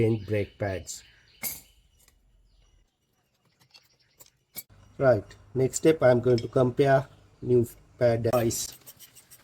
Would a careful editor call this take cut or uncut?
cut